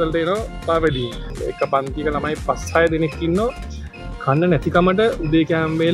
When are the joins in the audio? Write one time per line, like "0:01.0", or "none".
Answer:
0:01.3